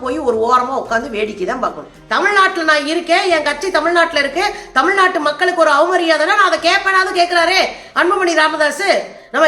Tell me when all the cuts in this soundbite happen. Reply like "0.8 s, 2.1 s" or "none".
1.9 s